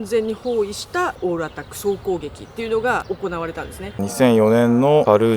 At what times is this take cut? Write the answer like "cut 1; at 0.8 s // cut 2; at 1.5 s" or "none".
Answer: cut 1; at 3.9 s